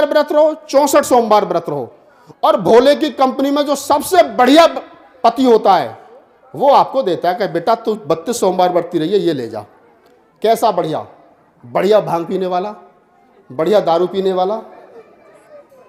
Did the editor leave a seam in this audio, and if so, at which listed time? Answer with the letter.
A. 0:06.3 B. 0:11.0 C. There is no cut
C